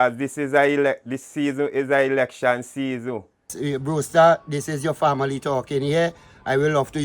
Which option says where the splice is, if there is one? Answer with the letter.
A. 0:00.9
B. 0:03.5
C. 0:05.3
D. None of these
B